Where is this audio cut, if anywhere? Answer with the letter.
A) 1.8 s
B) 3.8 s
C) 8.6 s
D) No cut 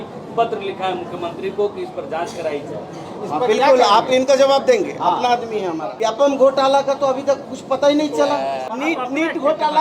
C